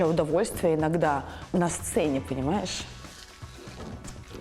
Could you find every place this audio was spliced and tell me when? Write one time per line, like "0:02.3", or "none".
0:01.3